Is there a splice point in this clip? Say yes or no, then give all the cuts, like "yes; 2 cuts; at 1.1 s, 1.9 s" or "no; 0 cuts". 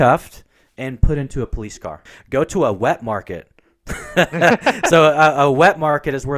yes; 1 cut; at 2.1 s